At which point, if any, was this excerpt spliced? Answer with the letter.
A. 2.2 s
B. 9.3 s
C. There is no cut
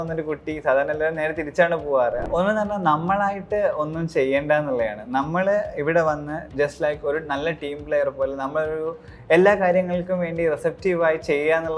A